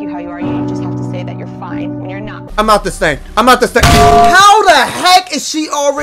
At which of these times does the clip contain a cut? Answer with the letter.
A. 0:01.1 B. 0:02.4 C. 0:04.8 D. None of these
B